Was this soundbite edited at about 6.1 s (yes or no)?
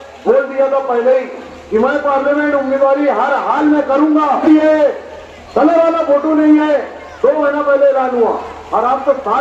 no